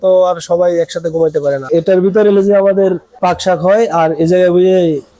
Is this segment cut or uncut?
cut